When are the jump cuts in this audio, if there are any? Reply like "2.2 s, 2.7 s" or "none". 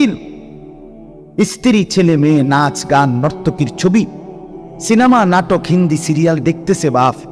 none